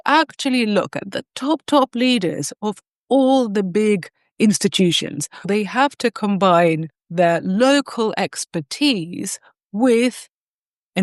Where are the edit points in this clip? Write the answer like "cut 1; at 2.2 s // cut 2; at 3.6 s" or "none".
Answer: cut 1; at 5.4 s